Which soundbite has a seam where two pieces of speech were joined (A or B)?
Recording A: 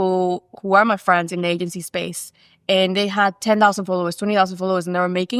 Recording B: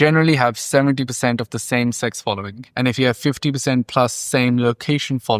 B